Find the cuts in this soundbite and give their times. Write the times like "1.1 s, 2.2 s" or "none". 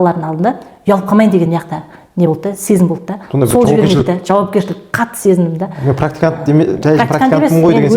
none